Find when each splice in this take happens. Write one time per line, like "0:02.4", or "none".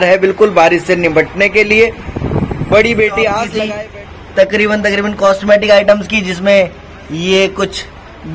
0:03.6